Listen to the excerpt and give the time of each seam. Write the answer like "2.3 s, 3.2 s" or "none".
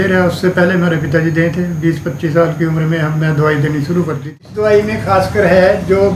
4.2 s